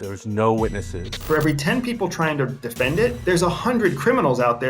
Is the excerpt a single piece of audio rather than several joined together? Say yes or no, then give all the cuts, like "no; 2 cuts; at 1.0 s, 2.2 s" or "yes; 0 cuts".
no; 1 cut; at 1.1 s